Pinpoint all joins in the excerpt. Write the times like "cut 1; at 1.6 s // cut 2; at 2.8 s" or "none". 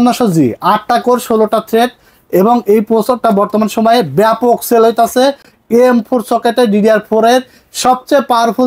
none